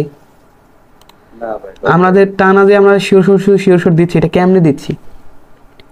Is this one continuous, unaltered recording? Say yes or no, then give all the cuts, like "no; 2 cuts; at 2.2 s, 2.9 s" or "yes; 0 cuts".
yes; 0 cuts